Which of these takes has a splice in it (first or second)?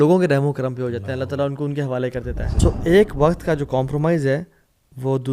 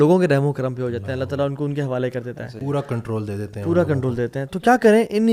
first